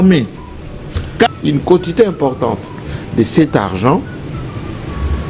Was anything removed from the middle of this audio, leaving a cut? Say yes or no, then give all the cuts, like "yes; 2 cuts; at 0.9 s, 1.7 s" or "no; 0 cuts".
yes; 1 cut; at 1.3 s